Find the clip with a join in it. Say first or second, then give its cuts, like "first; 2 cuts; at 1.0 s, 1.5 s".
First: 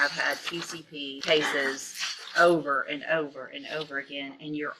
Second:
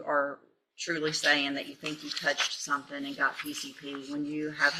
first; 1 cut; at 1.2 s